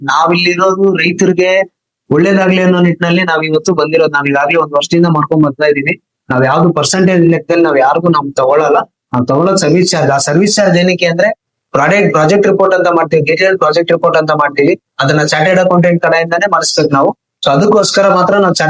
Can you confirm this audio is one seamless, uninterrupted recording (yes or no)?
yes